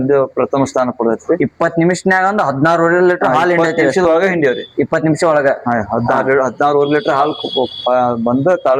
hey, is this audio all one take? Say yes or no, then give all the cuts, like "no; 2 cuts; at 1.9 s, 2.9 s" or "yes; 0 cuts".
yes; 0 cuts